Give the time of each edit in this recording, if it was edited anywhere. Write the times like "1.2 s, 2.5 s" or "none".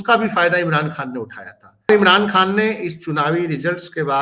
1.9 s